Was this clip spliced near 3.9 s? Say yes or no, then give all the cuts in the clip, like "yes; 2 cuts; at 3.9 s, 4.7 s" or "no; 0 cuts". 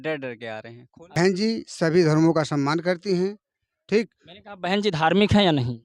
no; 1 cut; at 1.1 s